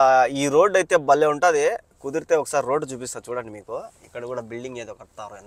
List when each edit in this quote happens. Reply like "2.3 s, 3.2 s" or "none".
none

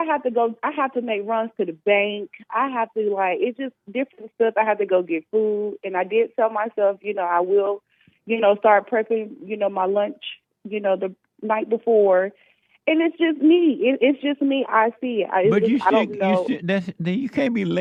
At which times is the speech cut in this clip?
none

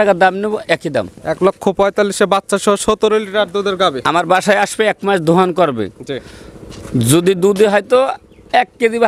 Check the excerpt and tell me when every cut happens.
none

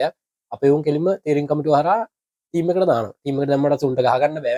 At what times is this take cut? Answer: none

